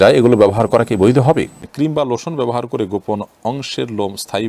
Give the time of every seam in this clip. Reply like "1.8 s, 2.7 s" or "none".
1.6 s

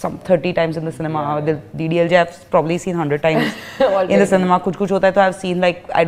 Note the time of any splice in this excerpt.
none

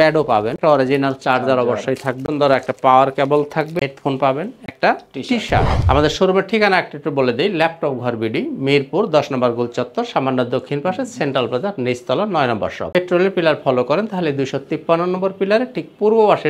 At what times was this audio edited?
5.8 s, 12.9 s

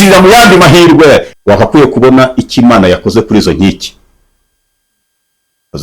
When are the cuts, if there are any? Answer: 1.3 s

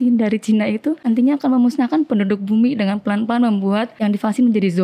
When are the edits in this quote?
1.0 s, 3.9 s

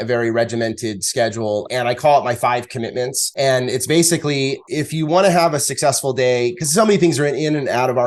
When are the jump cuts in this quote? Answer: 1.7 s, 3.2 s, 4.6 s

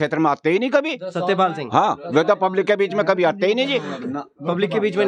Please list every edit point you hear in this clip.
none

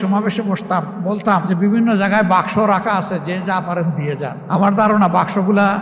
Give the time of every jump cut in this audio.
none

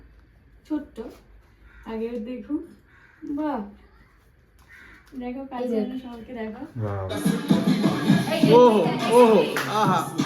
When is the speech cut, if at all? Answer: 7.1 s

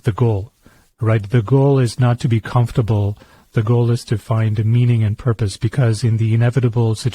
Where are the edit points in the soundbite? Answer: 3.4 s

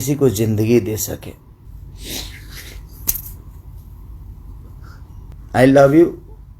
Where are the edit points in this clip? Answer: 1.7 s, 5.3 s

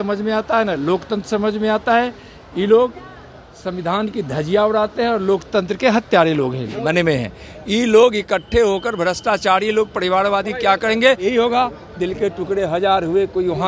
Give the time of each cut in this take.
6.8 s, 11.3 s

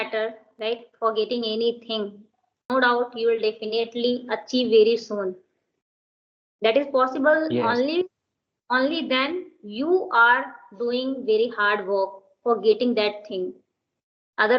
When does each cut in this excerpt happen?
2.6 s

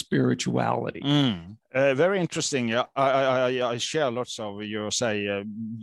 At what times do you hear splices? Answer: 1.5 s

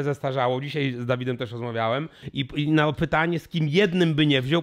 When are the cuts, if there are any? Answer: 2.2 s

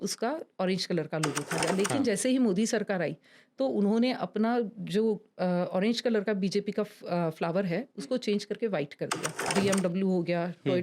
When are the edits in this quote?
1.6 s, 9.4 s

